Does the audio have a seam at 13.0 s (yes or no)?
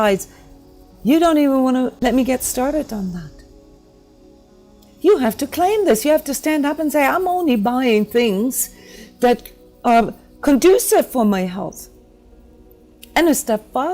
no